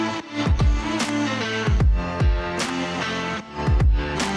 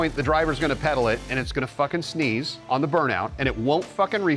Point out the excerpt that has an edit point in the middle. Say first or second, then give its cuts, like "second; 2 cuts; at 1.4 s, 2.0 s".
second; 1 cut; at 2.5 s